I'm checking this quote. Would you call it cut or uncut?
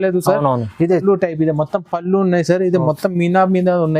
cut